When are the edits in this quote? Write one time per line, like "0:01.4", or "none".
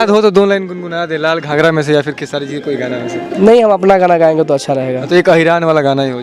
none